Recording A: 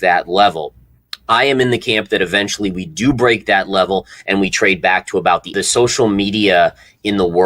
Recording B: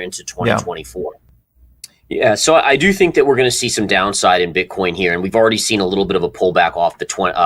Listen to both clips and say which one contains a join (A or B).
A